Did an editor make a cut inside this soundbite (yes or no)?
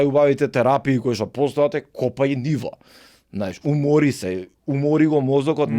no